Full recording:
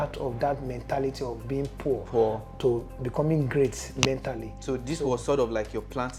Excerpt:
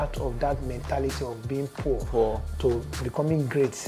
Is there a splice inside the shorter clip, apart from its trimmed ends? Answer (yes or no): no